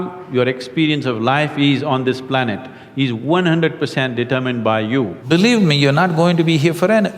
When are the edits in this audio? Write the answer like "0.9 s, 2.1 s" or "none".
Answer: 5.2 s